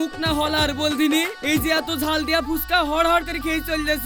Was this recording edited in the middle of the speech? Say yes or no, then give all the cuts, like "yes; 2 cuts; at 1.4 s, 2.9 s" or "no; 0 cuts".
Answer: no; 0 cuts